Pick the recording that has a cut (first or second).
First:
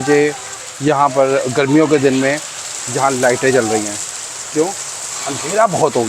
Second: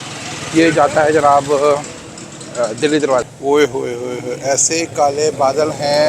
second